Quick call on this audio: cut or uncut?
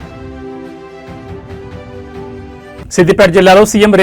cut